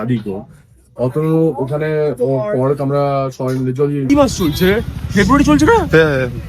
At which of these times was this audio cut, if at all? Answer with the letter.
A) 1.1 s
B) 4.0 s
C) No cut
B